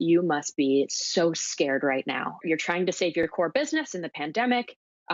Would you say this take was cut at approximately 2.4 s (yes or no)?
yes